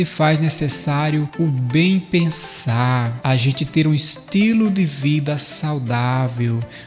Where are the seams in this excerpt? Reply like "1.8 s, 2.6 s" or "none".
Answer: 1.3 s, 3.1 s